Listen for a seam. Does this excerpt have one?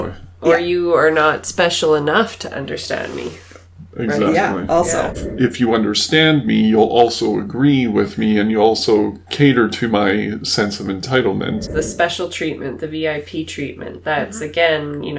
yes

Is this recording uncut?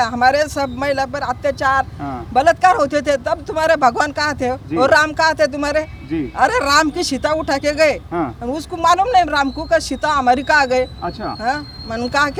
yes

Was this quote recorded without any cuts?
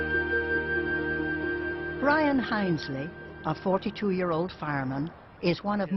no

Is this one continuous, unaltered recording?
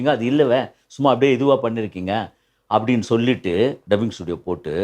no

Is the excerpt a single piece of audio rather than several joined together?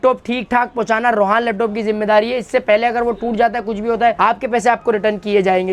yes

